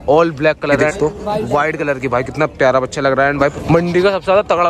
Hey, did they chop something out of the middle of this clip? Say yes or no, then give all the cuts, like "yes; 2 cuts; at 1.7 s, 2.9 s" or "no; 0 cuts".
yes; 2 cuts; at 0.9 s, 3.5 s